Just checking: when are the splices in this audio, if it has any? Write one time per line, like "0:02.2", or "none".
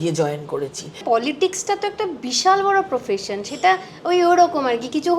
0:01.0